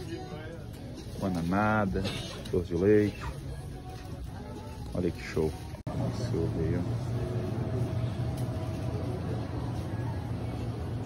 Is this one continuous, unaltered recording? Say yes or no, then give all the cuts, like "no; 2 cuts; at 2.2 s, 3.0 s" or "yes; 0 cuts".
yes; 0 cuts